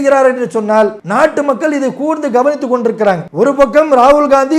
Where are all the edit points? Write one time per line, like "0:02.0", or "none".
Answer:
0:01.0
0:03.3